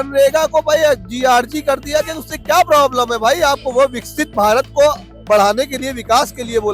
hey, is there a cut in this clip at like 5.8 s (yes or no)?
no